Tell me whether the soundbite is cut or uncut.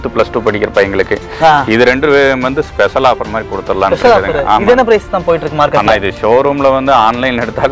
uncut